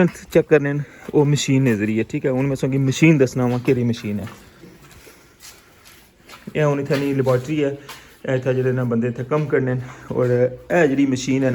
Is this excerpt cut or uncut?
uncut